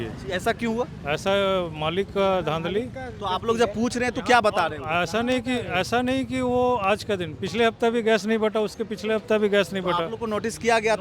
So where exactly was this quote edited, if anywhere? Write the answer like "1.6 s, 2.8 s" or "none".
none